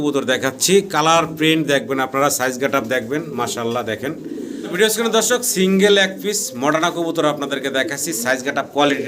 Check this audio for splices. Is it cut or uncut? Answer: cut